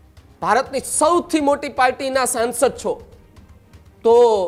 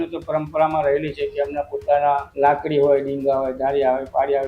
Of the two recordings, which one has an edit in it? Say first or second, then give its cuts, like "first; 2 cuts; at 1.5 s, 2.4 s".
second; 1 cut; at 2.3 s